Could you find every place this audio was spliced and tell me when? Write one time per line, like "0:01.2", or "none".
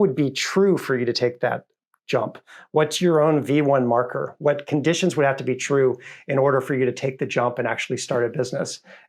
none

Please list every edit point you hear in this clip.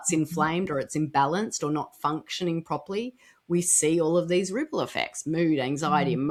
none

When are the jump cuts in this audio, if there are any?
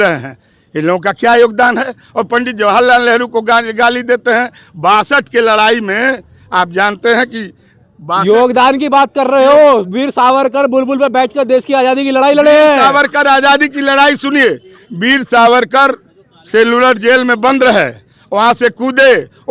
none

